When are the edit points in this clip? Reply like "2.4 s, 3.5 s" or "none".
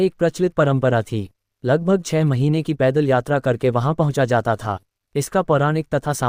none